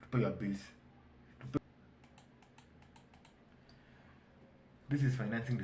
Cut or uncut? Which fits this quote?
cut